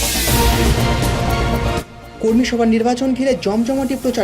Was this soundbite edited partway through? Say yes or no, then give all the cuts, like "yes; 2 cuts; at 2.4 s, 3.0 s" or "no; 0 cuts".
yes; 1 cut; at 2.0 s